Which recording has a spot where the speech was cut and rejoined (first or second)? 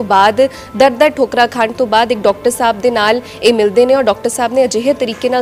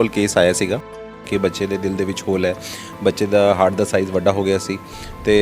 second